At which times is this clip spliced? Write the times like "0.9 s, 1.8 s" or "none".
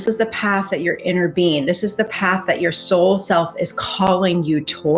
none